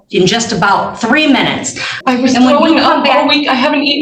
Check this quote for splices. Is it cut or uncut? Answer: cut